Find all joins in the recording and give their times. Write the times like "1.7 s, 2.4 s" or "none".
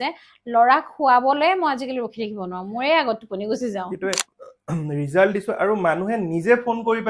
4.3 s

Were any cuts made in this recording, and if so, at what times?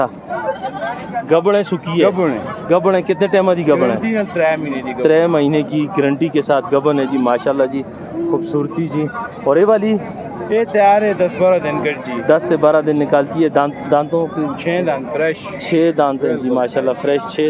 none

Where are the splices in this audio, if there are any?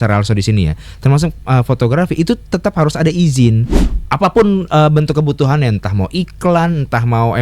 3.8 s

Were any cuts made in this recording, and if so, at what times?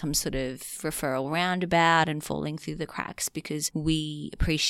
3.7 s

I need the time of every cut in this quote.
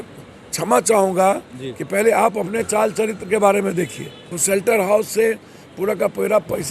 4.3 s

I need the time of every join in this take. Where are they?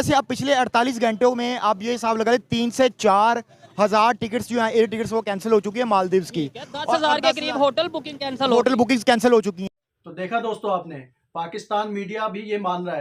none

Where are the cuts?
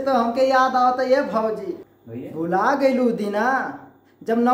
1.8 s

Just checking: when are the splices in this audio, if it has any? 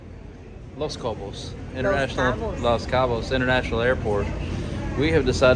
none

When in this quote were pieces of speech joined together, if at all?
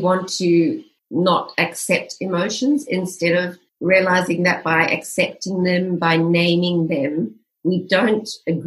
0.9 s, 3.6 s

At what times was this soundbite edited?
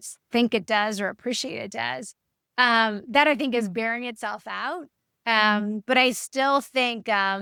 none

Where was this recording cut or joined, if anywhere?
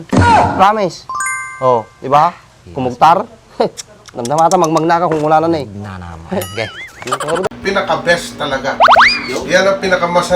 7.5 s

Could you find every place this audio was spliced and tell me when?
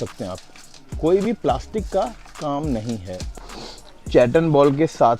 3.2 s

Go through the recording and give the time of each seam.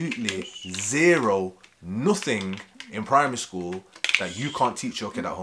none

